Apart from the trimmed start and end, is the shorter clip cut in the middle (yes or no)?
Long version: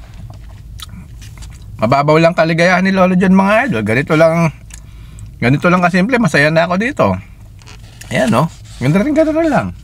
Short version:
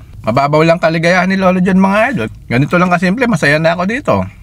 yes